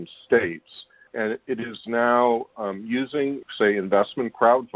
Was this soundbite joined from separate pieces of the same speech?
yes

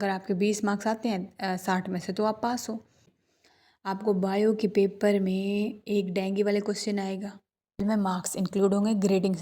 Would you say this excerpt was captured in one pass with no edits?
no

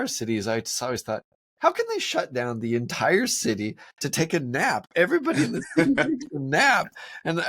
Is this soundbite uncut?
yes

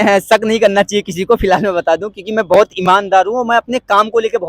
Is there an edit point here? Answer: no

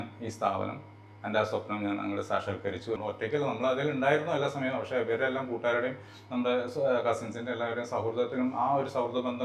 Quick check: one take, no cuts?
no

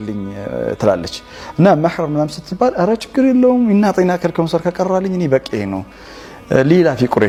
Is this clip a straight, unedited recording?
yes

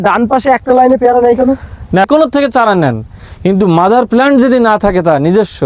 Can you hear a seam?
yes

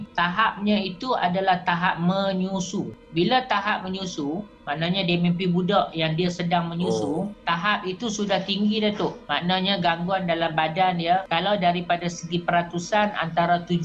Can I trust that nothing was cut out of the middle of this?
yes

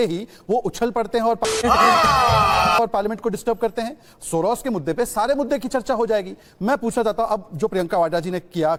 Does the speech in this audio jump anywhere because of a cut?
no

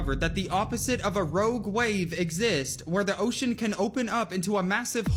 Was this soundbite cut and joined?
no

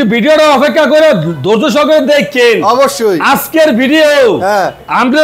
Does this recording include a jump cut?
no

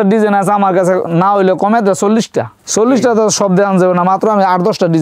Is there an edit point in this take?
no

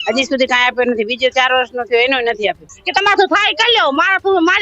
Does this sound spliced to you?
yes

